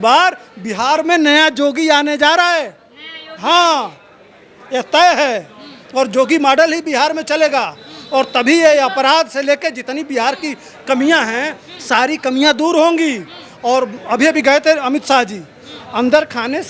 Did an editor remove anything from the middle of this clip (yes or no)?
no